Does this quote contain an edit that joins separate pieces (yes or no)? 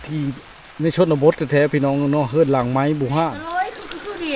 yes